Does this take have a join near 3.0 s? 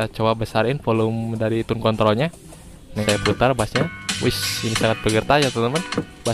yes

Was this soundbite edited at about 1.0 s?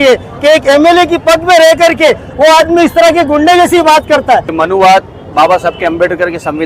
no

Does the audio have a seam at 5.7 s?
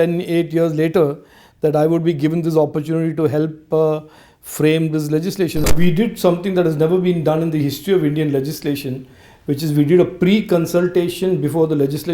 yes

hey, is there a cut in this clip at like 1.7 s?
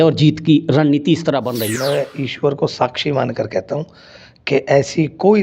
yes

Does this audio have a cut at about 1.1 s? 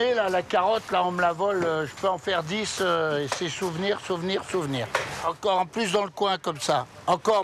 no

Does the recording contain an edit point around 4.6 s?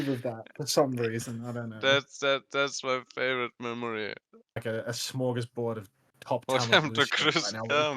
yes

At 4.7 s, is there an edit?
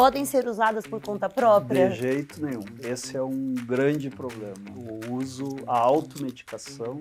yes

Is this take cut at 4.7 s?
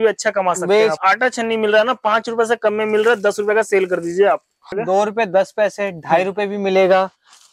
yes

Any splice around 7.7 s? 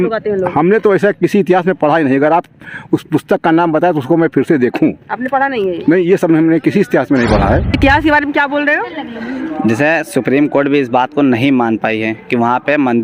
yes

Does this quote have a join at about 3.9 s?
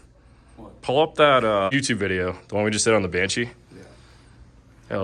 no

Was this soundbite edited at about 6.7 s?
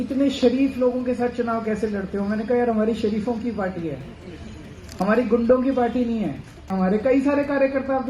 yes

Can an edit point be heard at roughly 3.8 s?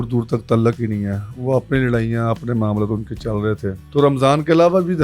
yes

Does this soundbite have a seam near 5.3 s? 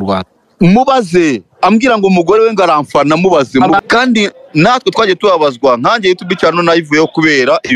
no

